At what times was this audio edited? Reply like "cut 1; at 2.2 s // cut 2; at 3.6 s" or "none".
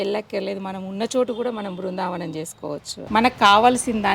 cut 1; at 3.0 s